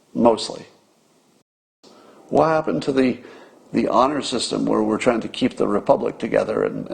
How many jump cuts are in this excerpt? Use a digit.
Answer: 1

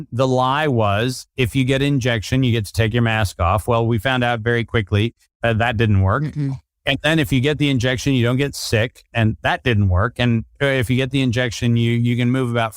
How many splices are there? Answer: 1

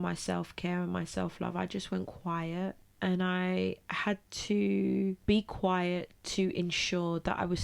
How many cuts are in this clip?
2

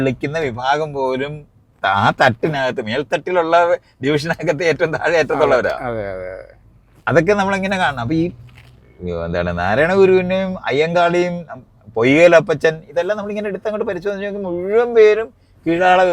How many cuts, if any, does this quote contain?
0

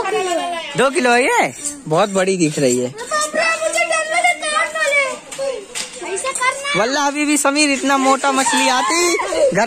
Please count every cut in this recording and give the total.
0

